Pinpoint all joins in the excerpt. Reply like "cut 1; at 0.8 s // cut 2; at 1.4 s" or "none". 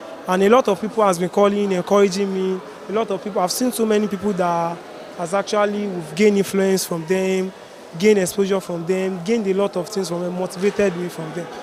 none